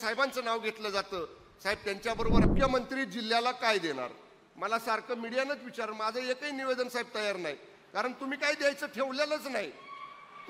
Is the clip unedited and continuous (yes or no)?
no